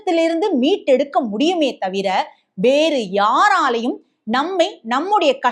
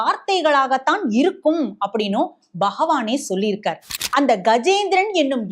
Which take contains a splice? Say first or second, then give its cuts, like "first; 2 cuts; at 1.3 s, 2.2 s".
second; 1 cut; at 3.9 s